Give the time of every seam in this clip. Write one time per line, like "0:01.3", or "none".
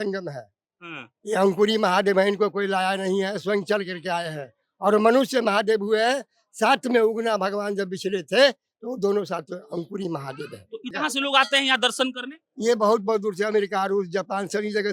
0:10.9

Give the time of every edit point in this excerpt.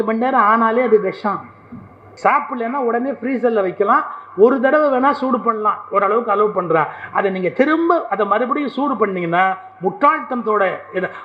0:02.1

